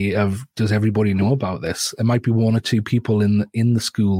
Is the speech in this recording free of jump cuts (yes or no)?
yes